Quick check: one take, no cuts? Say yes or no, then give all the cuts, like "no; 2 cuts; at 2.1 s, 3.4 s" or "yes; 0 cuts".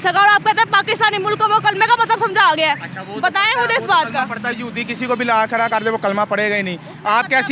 yes; 0 cuts